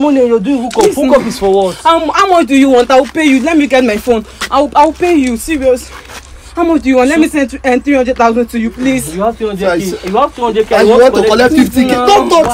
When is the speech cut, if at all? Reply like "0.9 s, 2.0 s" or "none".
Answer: none